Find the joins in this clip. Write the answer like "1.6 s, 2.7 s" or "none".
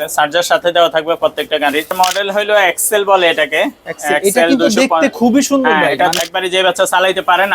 1.9 s, 6.2 s